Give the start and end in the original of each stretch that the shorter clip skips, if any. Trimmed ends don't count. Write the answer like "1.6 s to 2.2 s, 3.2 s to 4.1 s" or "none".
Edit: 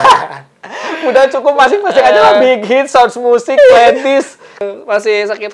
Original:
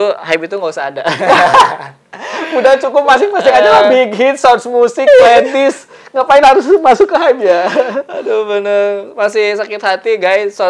6.1 s to 8.9 s